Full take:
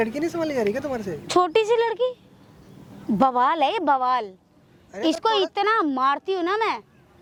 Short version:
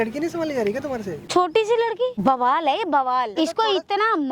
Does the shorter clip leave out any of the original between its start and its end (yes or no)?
yes